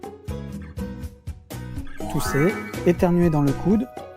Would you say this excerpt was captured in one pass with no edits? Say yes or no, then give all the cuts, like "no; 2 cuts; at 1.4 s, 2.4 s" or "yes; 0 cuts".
no; 1 cut; at 2.0 s